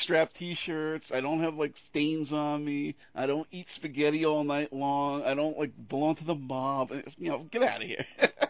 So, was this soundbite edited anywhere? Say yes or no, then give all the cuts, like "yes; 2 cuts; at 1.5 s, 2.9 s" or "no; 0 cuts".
no; 0 cuts